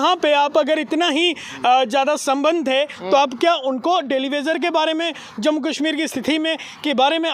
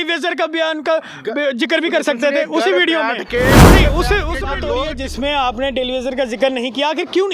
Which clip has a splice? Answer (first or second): second